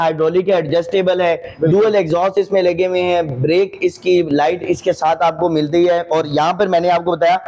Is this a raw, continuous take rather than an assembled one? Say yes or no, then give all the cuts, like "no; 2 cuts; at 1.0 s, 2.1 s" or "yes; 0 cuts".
yes; 0 cuts